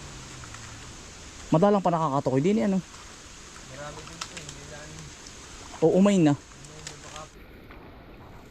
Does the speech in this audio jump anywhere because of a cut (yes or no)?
yes